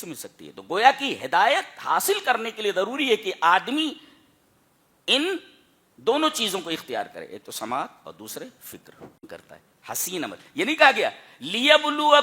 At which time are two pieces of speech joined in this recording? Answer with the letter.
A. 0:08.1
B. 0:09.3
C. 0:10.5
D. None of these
B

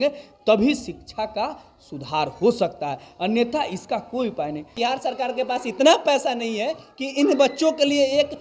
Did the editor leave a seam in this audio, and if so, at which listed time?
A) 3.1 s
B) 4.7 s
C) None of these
B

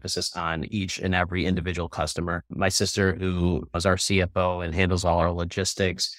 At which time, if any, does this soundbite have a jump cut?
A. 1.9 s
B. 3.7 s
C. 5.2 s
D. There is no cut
B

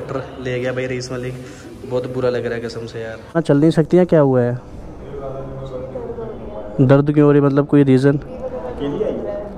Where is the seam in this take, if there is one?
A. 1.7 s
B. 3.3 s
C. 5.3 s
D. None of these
B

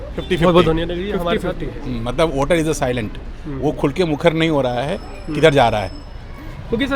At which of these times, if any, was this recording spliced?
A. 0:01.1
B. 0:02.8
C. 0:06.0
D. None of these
A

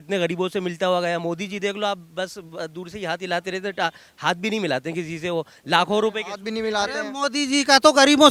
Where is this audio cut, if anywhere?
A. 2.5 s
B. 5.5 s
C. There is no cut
C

